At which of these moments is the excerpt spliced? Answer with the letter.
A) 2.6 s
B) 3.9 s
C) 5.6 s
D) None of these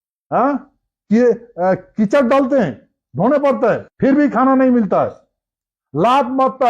B